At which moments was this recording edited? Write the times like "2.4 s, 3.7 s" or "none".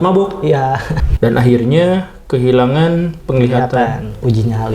0.9 s

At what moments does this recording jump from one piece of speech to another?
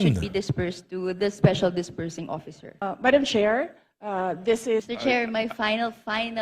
2.8 s, 4.9 s

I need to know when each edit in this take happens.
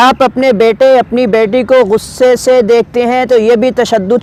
none

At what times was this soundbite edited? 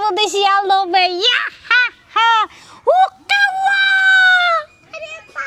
none

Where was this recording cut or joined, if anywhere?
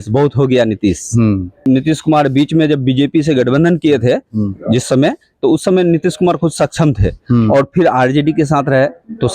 1.6 s

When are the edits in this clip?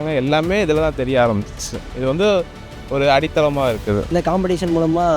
4.1 s

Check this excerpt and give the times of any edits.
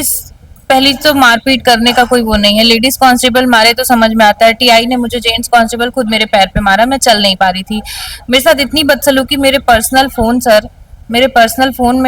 none

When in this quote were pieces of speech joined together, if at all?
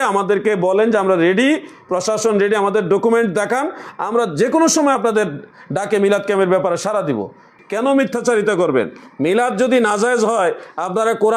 7.5 s

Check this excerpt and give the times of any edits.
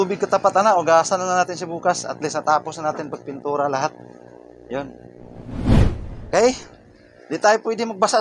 5.4 s, 6.1 s

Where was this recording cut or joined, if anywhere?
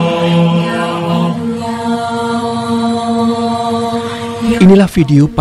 none

